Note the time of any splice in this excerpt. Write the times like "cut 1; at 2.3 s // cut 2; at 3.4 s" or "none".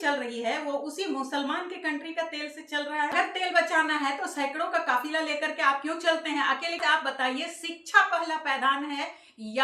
cut 1; at 3.1 s // cut 2; at 6.8 s